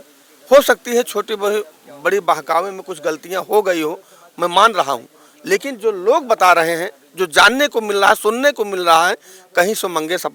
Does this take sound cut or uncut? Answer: uncut